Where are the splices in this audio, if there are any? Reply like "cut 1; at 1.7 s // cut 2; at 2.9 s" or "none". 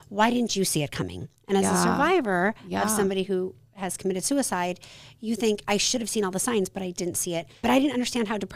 cut 1; at 7.6 s

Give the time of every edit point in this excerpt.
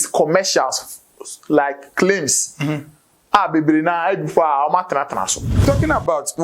cut 1; at 5.6 s

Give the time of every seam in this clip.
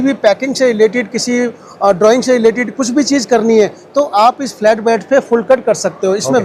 none

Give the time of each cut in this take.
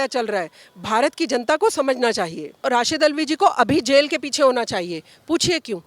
cut 1; at 2.6 s

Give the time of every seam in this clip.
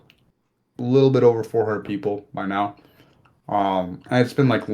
none

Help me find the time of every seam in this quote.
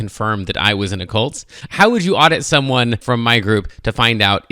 cut 1; at 1.6 s // cut 2; at 3.0 s

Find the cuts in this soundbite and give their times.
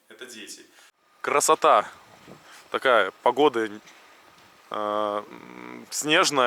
cut 1; at 1.0 s

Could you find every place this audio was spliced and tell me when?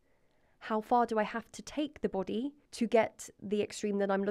cut 1; at 2.6 s

